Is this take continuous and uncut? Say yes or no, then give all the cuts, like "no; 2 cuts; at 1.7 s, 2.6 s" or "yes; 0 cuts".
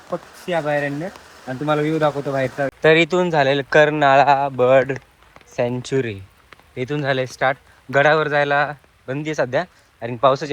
no; 1 cut; at 2.5 s